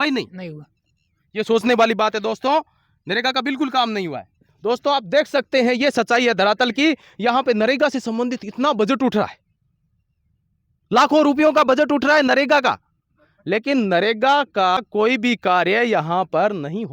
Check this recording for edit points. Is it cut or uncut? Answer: uncut